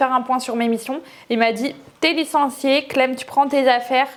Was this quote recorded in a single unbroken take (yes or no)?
yes